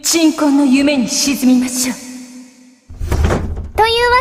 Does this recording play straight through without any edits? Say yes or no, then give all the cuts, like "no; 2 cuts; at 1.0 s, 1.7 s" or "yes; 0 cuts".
yes; 0 cuts